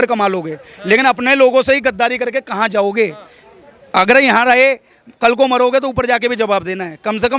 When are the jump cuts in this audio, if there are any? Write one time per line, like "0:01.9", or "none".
none